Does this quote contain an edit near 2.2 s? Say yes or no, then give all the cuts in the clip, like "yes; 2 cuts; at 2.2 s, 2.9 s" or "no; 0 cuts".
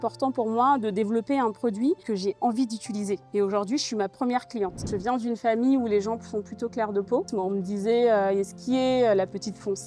no; 2 cuts; at 4.9 s, 7.3 s